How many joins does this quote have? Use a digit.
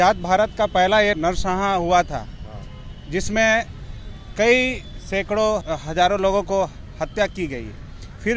2